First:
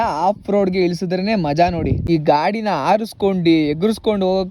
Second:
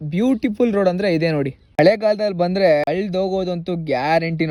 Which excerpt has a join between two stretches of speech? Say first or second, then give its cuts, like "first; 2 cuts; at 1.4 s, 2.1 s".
first; 1 cut; at 2.0 s